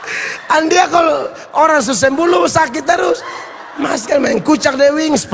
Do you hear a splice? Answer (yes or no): no